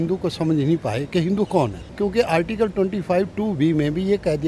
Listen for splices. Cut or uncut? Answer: cut